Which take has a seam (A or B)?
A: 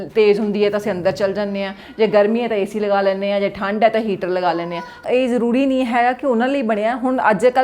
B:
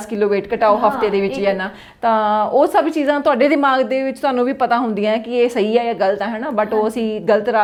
A